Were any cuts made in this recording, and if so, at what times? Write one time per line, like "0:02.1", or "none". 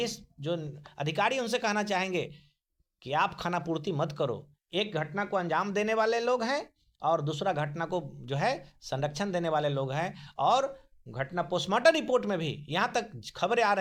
none